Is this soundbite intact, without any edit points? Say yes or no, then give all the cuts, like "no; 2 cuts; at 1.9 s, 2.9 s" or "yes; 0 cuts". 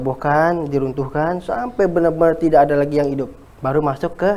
no; 1 cut; at 3.4 s